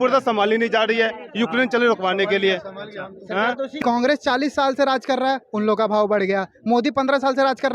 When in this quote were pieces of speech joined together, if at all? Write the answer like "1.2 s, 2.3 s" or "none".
3.7 s